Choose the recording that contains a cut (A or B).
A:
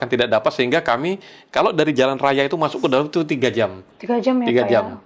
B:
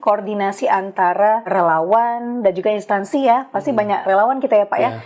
B